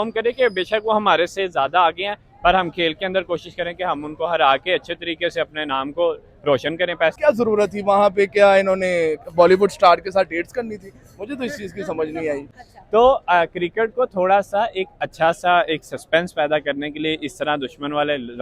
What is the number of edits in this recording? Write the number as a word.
two